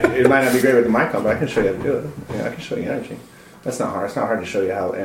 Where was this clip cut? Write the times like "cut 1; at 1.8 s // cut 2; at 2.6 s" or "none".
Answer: none